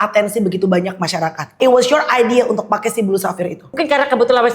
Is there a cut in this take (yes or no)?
yes